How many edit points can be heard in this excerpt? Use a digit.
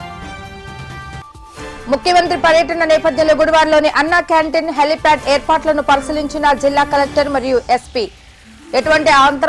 1